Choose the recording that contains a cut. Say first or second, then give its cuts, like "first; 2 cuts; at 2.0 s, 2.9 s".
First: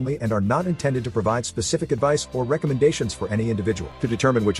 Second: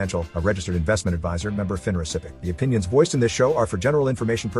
second; 1 cut; at 2.3 s